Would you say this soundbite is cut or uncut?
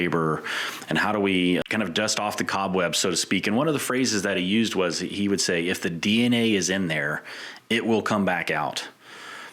cut